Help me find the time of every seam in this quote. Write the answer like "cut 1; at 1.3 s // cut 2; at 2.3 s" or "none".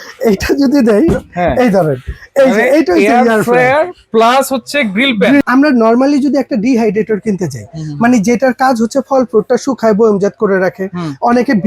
cut 1; at 5.4 s